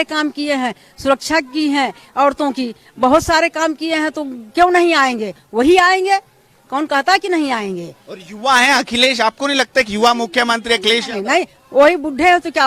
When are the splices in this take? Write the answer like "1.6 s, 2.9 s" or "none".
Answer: none